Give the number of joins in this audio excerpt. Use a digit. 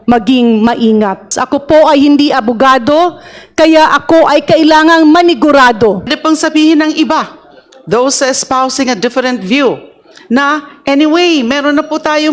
2